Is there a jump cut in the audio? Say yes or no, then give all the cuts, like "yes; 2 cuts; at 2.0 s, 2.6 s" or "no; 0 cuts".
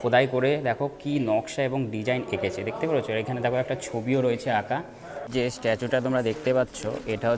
yes; 1 cut; at 5.2 s